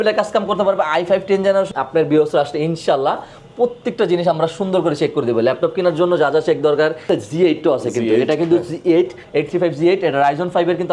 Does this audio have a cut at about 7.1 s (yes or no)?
yes